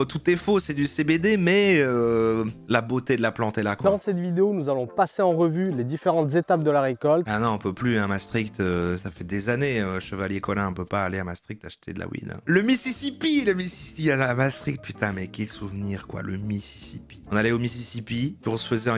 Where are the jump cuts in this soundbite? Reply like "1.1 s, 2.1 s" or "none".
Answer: 3.8 s, 7.3 s, 12.4 s

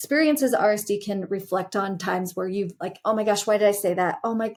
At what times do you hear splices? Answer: none

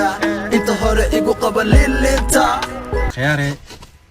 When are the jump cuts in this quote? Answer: 3.1 s

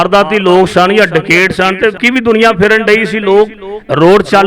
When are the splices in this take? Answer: 2.0 s

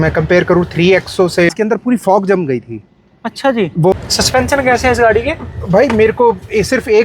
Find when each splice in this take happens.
1.5 s, 3.9 s

